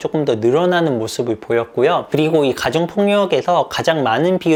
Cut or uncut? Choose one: uncut